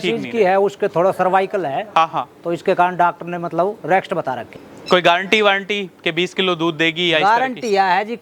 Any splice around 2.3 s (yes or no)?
no